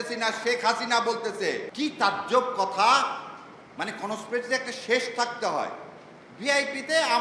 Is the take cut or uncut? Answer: cut